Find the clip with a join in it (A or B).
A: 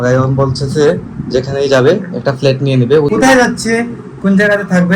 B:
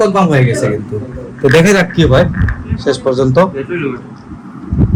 A